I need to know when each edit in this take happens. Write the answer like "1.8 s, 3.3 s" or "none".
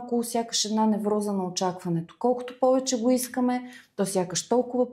none